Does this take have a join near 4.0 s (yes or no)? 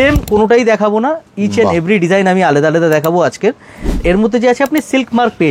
yes